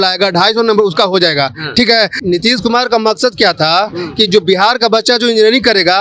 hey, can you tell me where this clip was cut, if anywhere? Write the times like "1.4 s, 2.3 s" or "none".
2.1 s